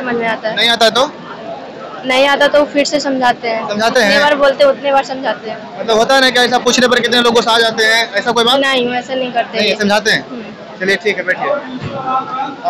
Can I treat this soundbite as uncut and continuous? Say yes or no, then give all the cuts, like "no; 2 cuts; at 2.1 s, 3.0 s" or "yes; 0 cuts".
yes; 0 cuts